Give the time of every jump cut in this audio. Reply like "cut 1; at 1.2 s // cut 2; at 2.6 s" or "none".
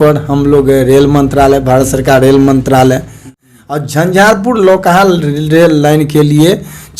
cut 1; at 3.4 s